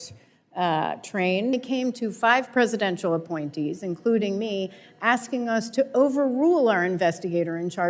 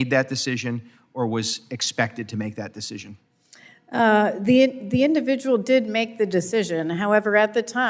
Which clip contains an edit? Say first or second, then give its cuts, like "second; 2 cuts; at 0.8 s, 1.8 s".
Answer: first; 1 cut; at 1.5 s